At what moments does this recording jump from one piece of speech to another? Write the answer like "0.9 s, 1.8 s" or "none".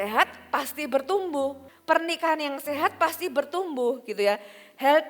1.7 s